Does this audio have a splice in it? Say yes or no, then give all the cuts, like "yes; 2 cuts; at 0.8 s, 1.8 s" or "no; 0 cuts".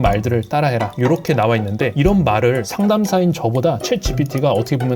no; 0 cuts